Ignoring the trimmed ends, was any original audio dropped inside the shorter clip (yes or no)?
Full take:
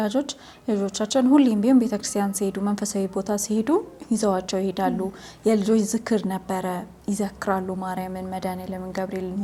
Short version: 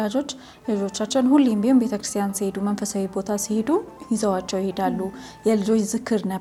no